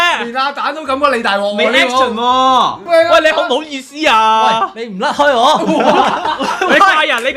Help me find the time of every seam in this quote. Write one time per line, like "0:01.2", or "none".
0:02.8